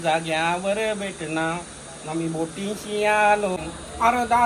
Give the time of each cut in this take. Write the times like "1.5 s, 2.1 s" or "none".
3.6 s